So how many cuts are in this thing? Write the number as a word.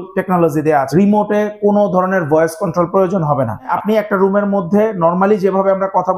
two